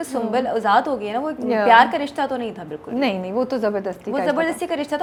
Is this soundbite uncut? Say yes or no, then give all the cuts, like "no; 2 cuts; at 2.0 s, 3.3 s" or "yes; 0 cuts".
yes; 0 cuts